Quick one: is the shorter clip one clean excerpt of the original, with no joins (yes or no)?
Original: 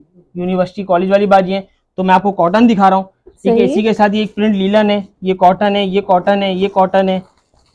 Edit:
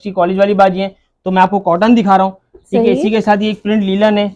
yes